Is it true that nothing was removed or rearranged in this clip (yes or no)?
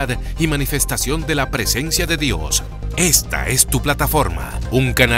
yes